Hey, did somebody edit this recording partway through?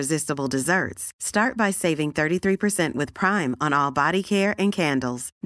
no; 0 cuts

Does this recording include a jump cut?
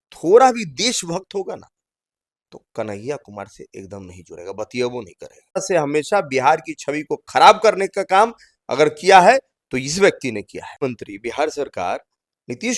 yes; 2 cuts; at 5.6 s, 10.8 s

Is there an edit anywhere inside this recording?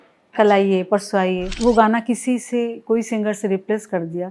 yes; 1 cut; at 1.5 s

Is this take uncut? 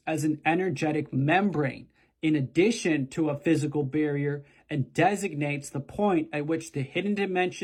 yes; 0 cuts

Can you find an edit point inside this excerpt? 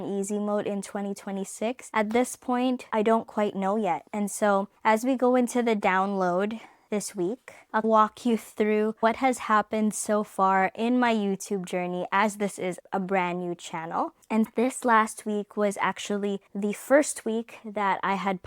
yes; 4 cuts; at 1.8 s, 2.8 s, 4.1 s, 7.2 s

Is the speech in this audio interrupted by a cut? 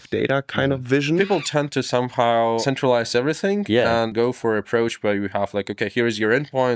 yes; 3 cuts; at 1.2 s, 2.6 s, 4.1 s

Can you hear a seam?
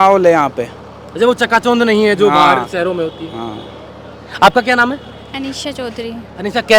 no; 0 cuts

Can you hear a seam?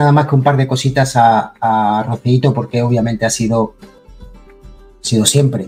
no; 0 cuts

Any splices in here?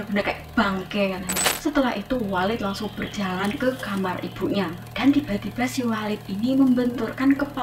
yes; 1 cut; at 1.4 s

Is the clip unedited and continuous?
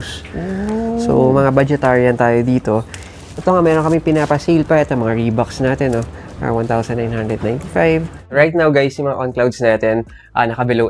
no; 1 cut; at 8.3 s

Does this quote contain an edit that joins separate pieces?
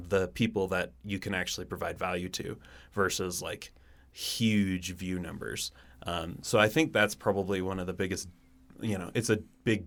no; 0 cuts

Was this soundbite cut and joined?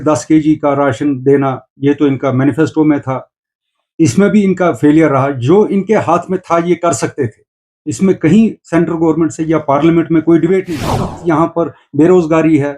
yes; 1 cut; at 11.1 s

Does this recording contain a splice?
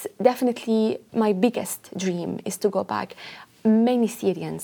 yes; 1 cut; at 1.0 s

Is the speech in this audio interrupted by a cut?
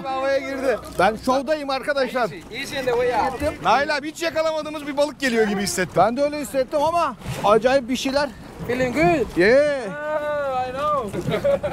yes; 3 cuts; at 0.9 s, 3.4 s, 7.2 s

